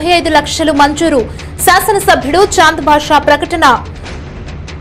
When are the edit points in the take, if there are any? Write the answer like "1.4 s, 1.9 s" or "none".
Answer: 3.9 s